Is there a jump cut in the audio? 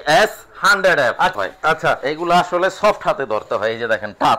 yes; 1 cut; at 1.3 s

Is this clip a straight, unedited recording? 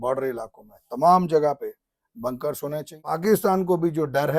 no; 1 cut; at 3.1 s

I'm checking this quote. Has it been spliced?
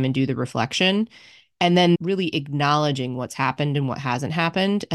yes; 1 cut; at 2.0 s

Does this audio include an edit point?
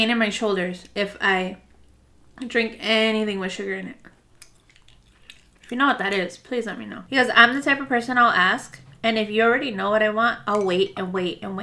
yes; 1 cut; at 6.9 s

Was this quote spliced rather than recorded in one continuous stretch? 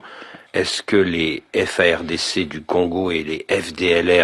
no; 0 cuts

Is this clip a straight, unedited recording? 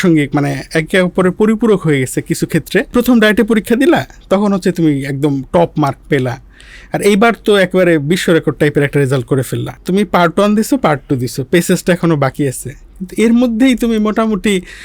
no; 2 cuts; at 2.9 s, 9.8 s

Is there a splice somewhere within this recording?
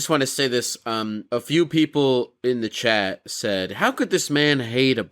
yes; 1 cut; at 1.2 s

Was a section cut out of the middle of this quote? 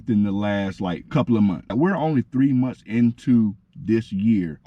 yes; 1 cut; at 1.7 s

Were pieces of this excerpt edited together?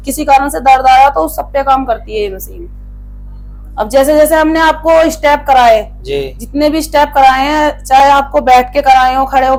no; 0 cuts

